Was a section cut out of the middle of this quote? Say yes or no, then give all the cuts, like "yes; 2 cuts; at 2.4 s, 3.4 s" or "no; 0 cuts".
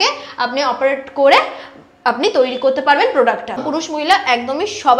yes; 1 cut; at 3.7 s